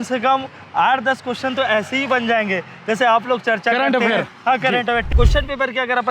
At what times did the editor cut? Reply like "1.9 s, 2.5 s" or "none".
5.1 s

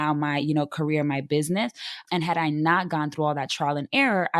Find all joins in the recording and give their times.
none

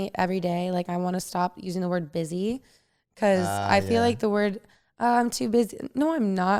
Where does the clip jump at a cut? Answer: none

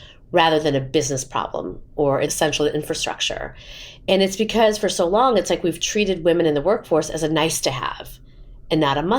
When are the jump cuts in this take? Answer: none

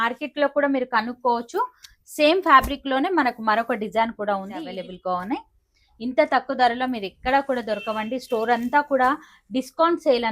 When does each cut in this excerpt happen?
4.7 s

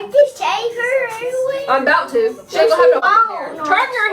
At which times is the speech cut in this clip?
3.0 s

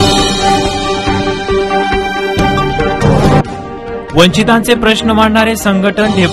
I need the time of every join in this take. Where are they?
3.4 s

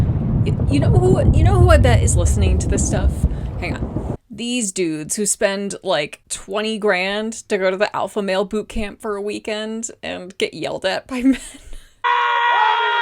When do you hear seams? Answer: 11.9 s

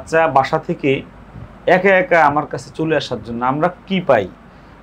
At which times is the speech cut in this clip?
none

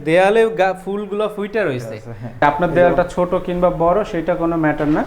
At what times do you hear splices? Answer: 2.4 s

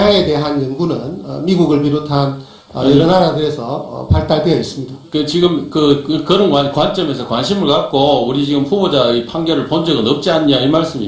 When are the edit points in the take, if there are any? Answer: 3.4 s

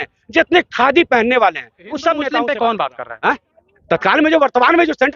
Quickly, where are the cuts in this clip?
2.3 s

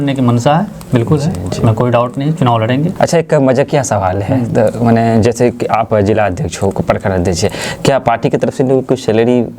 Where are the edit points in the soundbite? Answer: 2.9 s

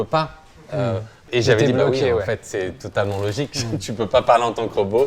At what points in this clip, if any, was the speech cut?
1.3 s

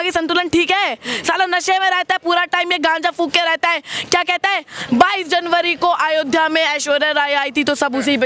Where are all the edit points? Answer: none

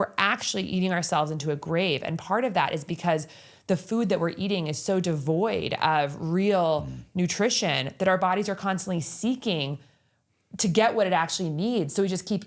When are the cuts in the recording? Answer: none

